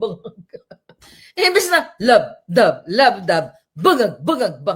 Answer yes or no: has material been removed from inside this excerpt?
no